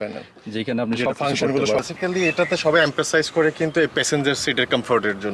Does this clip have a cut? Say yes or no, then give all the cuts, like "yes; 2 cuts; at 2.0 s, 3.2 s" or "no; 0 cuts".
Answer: yes; 1 cut; at 1.8 s